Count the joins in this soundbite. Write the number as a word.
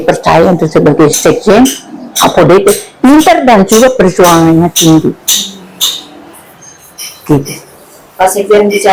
zero